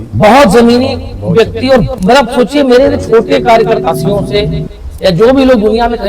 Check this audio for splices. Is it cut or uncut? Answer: cut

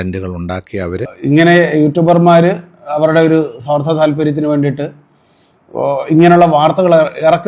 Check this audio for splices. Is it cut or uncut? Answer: cut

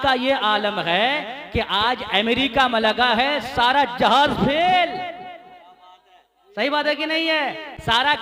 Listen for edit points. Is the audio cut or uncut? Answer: uncut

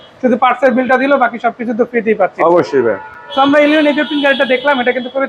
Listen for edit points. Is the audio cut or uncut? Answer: uncut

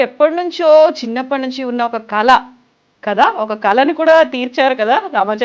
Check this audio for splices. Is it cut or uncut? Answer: uncut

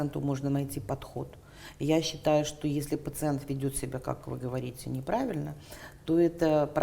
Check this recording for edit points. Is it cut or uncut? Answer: uncut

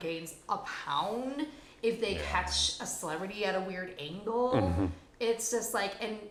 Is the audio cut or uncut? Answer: uncut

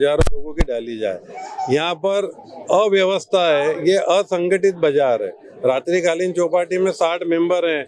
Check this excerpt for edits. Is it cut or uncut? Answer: uncut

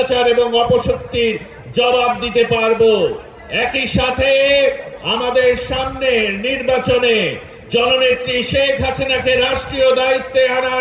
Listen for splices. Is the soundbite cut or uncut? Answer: uncut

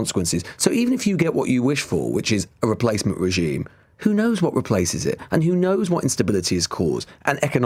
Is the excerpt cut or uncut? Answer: uncut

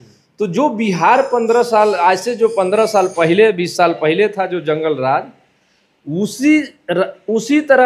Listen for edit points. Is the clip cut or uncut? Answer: uncut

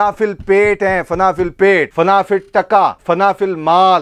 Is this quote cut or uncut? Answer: cut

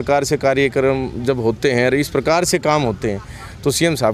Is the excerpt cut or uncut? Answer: uncut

